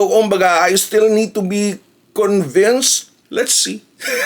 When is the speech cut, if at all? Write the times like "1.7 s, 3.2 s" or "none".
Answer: 3.1 s